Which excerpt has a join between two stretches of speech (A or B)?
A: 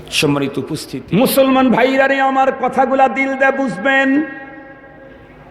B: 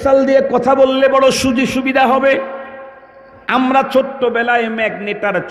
A